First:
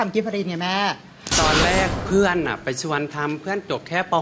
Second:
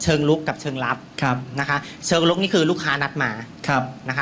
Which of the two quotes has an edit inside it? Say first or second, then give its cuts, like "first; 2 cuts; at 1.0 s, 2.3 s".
first; 1 cut; at 1.2 s